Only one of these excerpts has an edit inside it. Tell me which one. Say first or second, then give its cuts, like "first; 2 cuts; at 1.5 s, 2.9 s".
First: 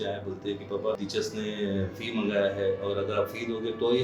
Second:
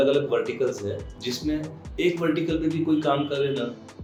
first; 1 cut; at 1.0 s